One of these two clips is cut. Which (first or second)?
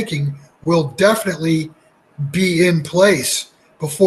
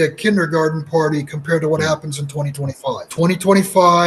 second